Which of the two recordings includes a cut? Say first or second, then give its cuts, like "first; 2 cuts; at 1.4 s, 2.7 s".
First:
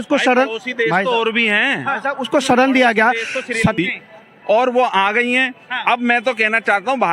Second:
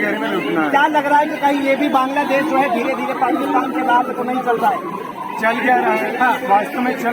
first; 1 cut; at 3.7 s